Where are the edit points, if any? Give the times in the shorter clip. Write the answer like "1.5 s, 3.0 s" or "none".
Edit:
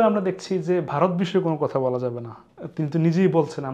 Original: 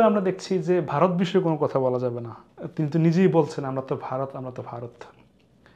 none